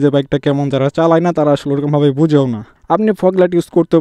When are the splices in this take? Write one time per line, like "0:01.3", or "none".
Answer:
0:02.7